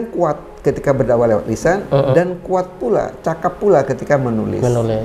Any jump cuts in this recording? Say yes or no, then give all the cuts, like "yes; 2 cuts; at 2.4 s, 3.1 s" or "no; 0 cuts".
no; 0 cuts